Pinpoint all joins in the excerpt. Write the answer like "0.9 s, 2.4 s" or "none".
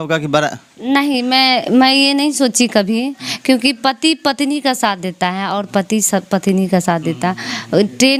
none